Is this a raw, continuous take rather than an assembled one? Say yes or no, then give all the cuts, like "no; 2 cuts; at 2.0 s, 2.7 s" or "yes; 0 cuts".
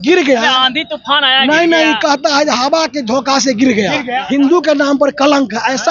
no; 1 cut; at 4.2 s